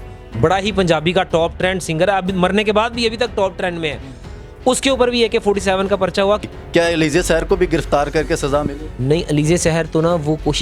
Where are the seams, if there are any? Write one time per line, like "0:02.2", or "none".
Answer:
0:06.4